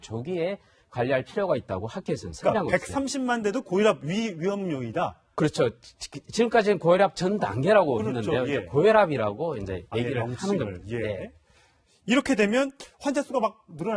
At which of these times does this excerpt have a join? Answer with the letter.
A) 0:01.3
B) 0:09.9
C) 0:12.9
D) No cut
A